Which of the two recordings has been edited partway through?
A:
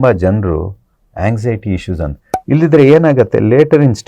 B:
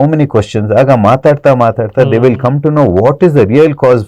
A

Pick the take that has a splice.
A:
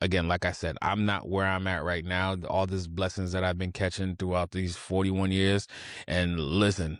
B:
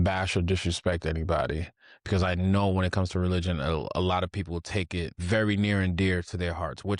B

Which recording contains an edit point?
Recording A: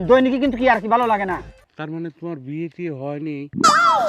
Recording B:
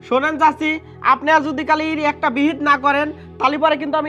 A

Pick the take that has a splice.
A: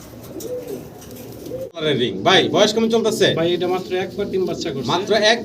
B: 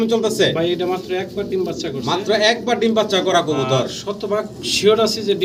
A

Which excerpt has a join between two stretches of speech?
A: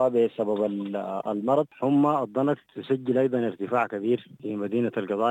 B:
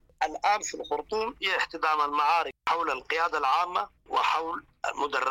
A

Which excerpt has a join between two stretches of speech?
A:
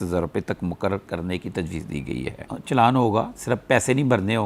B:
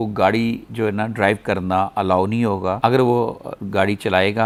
A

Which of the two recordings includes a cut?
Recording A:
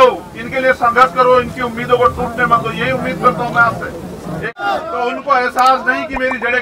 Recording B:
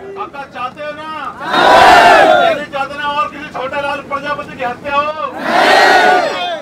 A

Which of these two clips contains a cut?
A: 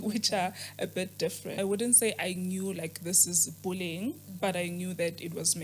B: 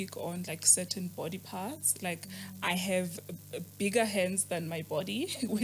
A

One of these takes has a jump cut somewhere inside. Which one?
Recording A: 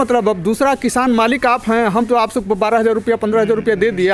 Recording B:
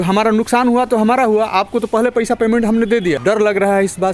B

